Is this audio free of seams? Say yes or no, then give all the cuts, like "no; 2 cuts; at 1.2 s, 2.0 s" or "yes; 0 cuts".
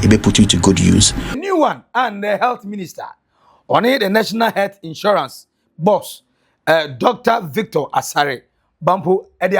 no; 1 cut; at 1.4 s